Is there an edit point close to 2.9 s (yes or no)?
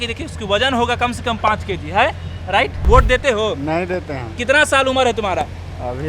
yes